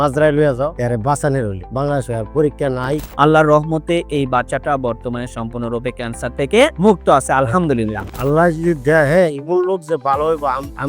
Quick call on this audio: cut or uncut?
cut